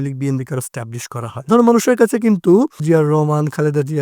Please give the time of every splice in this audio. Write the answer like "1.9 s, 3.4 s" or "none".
1.4 s, 2.8 s